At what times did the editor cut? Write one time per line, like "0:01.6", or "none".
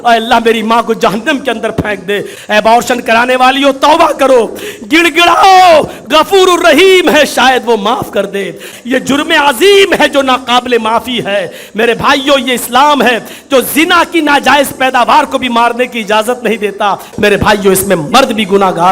0:02.3
0:08.7
0:17.1